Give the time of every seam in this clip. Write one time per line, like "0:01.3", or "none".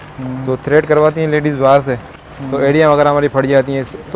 0:02.1